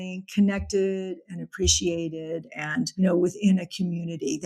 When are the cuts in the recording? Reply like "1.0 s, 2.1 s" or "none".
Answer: 2.9 s